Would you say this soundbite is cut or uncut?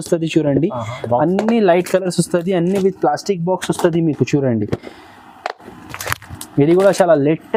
uncut